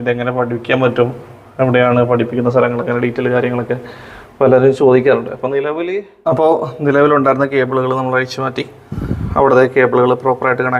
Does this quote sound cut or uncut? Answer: cut